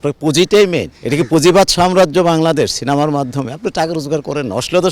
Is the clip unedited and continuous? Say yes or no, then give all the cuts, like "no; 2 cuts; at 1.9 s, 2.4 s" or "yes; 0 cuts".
no; 1 cut; at 0.9 s